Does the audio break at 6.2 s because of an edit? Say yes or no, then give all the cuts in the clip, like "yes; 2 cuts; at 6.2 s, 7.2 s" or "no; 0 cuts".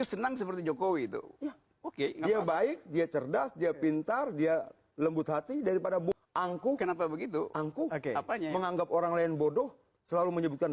yes; 1 cut; at 6.2 s